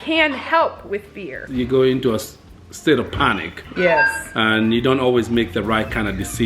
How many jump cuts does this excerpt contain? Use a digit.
1